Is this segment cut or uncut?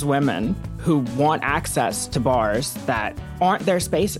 cut